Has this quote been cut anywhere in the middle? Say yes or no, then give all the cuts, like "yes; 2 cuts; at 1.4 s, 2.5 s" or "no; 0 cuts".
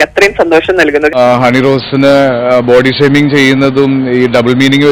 yes; 1 cut; at 1.1 s